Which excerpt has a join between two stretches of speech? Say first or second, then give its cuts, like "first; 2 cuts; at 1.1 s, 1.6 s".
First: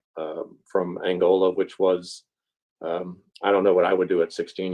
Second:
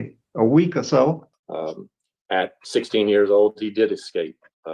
second; 1 cut; at 1.4 s